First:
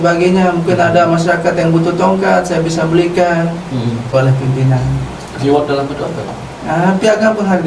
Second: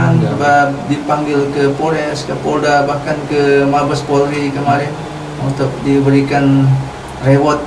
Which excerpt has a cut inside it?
first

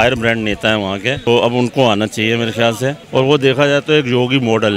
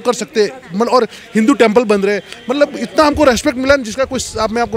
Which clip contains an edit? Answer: first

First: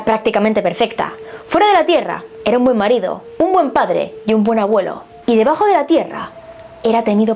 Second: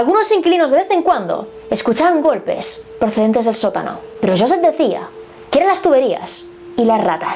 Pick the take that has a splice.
first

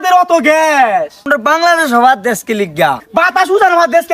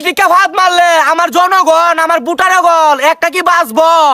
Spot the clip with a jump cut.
first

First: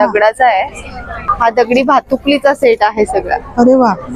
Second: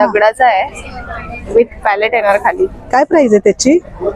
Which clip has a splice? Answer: first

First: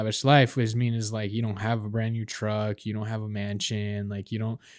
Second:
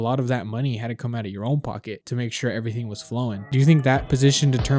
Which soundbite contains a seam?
second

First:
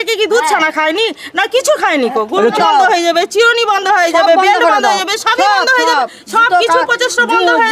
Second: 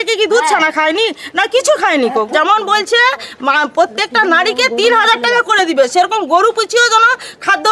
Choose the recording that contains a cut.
second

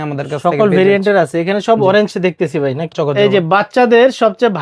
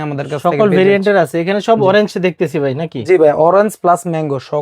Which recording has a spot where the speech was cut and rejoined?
first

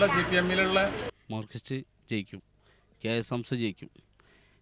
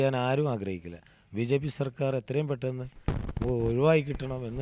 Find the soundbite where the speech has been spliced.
first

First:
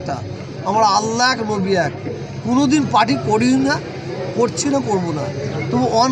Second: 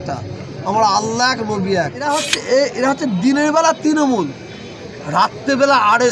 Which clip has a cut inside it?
second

